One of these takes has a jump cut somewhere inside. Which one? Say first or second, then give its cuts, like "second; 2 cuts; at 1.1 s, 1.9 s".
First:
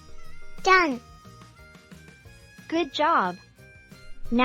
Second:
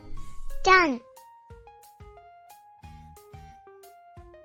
first; 2 cuts; at 1.0 s, 2.7 s